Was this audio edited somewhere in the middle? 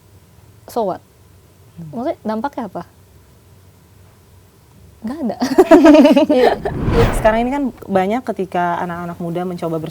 yes; 1 cut; at 7.0 s

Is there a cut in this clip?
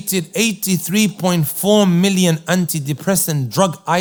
no; 0 cuts

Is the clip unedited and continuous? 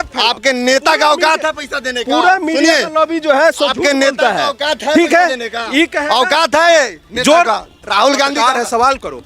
yes; 0 cuts

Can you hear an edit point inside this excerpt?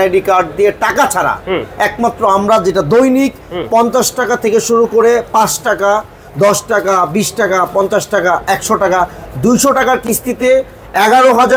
no; 0 cuts

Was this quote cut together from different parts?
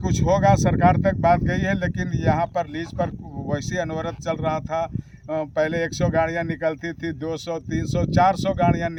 no; 0 cuts

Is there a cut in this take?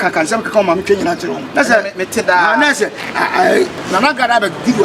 yes; 2 cuts; at 1.4 s, 3.8 s

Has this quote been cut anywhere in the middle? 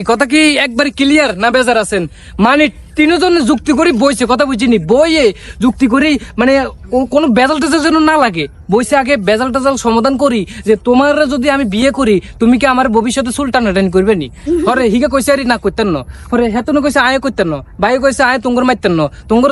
no; 0 cuts

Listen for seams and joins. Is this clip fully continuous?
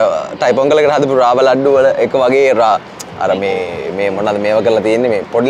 yes; 0 cuts

